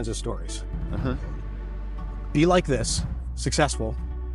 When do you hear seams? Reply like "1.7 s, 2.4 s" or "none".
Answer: none